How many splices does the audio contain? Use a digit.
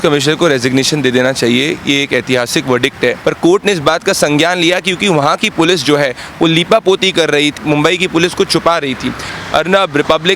3